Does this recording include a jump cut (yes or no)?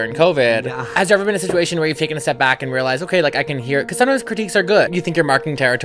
yes